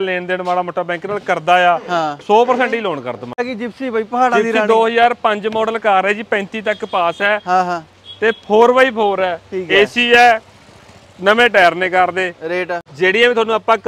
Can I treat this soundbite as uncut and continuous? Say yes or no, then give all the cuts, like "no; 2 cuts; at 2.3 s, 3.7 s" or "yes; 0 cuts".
no; 2 cuts; at 3.5 s, 12.8 s